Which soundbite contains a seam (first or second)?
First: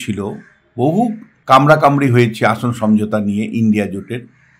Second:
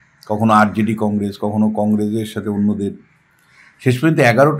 first